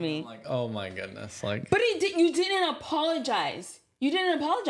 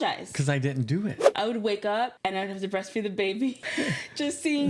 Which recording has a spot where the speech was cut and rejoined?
second; 3 cuts; at 1.3 s, 2.1 s, 3.6 s

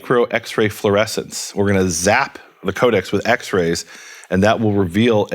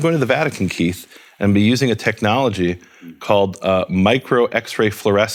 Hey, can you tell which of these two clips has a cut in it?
first; 1 cut; at 2.6 s

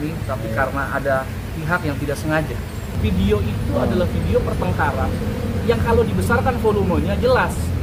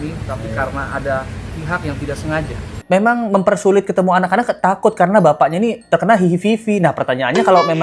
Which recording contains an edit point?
second; 1 cut; at 2.7 s

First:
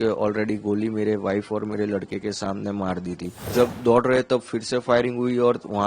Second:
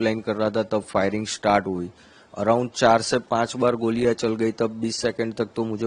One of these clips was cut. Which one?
first; 1 cut; at 3.4 s

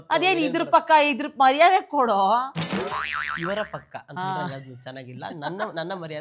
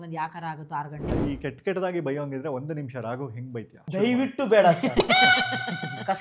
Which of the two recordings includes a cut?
second; 2 cuts; at 1.1 s, 3.8 s

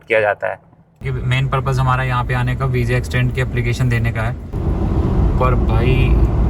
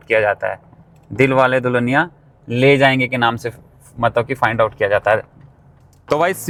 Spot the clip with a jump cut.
first; 2 cuts; at 1.0 s, 4.6 s

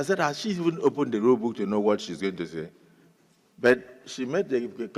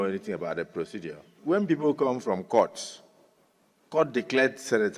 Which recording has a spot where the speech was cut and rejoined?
second; 1 cut; at 1.3 s

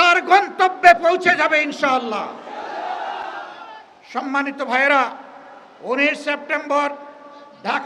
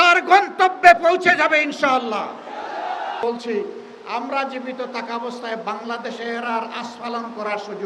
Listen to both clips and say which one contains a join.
second; 1 cut; at 3.2 s

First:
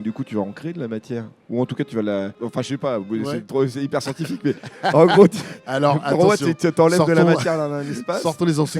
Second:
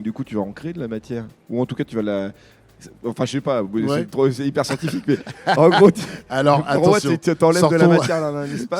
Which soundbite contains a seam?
first; 1 cut; at 2.3 s

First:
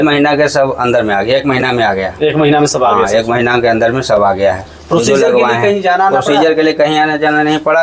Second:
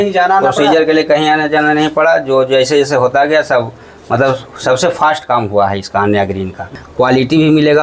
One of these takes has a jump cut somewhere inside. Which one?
second; 1 cut; at 6.8 s

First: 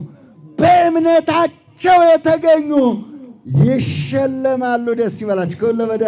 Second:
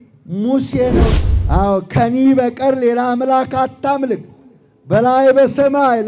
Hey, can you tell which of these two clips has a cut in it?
second; 1 cut; at 1.1 s

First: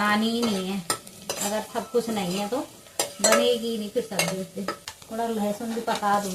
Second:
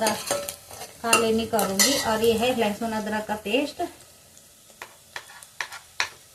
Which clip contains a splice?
first; 1 cut; at 4.8 s

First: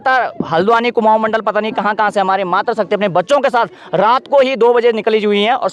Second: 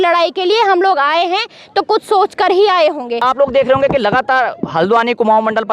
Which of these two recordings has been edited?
second; 1 cut; at 3.2 s

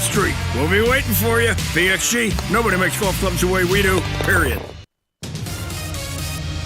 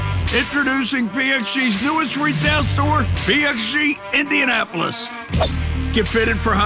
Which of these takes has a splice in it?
first; 1 cut; at 5.0 s

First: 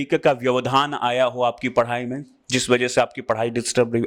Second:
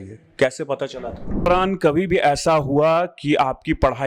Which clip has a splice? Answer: second; 1 cut; at 1.5 s

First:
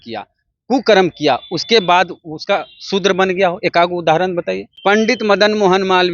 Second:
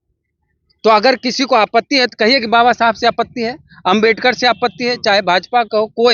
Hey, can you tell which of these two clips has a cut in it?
first; 1 cut; at 4.6 s

